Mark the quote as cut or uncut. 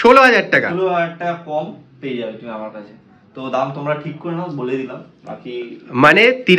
uncut